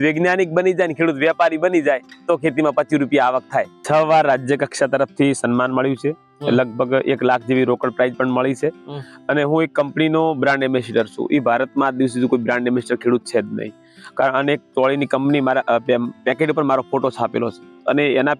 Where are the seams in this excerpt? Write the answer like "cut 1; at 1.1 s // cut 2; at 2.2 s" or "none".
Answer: cut 1; at 3.8 s